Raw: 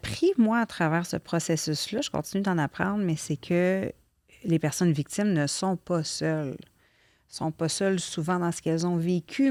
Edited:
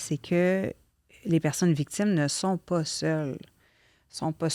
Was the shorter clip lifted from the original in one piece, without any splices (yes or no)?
yes